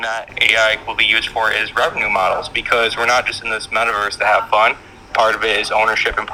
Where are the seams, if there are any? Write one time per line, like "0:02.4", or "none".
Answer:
none